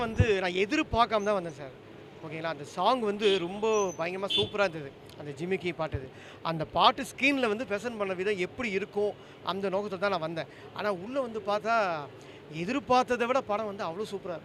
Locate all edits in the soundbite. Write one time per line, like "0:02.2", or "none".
none